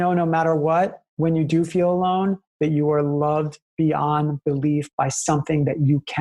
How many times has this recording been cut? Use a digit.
1